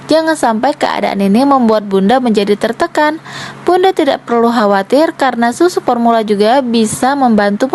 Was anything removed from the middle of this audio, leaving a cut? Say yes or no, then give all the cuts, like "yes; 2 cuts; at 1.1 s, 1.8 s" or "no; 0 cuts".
no; 0 cuts